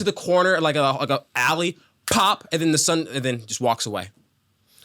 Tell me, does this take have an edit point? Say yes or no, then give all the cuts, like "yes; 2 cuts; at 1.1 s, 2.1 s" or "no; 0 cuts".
no; 0 cuts